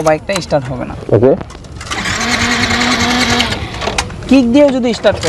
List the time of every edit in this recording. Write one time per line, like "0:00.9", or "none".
none

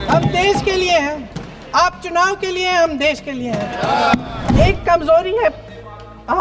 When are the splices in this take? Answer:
0:04.5

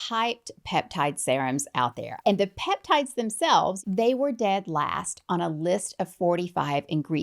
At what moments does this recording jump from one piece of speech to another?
0:02.1
0:03.8

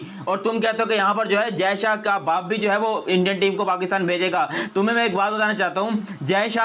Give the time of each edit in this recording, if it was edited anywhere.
none

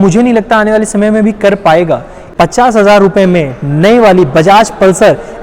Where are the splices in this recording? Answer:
0:02.2

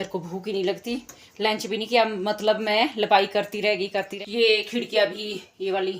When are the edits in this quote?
0:04.1

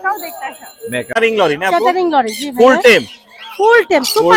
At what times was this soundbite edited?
0:01.1

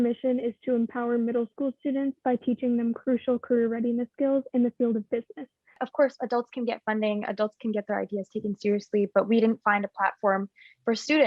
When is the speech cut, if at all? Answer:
0:05.8

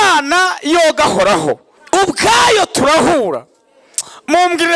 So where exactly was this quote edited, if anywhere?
0:01.7

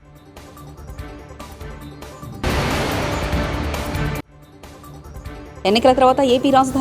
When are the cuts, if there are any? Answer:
0:02.4
0:05.1

